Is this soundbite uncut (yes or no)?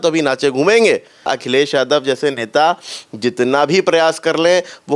no